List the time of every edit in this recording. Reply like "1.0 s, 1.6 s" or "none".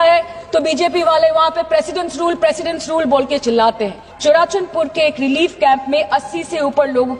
4.0 s